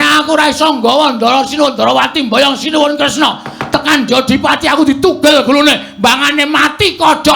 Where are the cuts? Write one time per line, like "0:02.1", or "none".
none